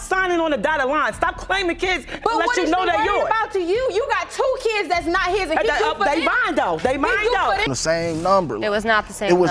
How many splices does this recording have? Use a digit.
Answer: 1